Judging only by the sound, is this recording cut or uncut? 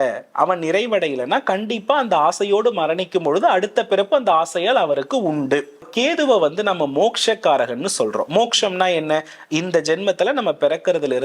cut